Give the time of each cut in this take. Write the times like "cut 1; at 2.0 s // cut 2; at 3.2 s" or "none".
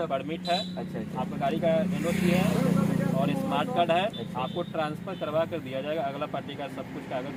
none

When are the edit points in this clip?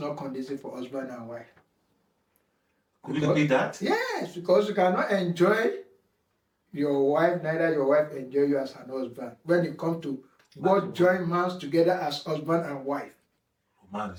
none

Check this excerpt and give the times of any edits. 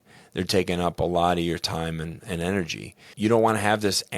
cut 1; at 3.1 s

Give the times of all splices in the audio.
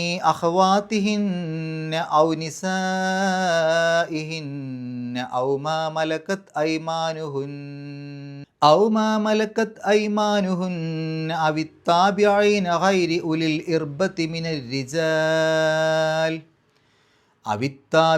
cut 1; at 8.4 s

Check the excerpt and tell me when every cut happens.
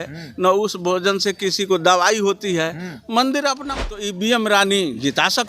cut 1; at 3.9 s

